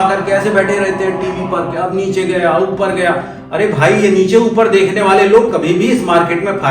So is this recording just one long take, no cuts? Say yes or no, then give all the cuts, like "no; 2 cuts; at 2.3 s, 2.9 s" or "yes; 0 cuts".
yes; 0 cuts